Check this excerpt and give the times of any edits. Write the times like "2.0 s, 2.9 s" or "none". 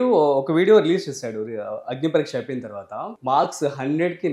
3.2 s